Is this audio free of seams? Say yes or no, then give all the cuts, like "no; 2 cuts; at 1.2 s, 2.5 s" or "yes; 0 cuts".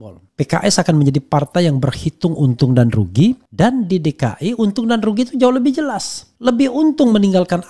no; 1 cut; at 3.5 s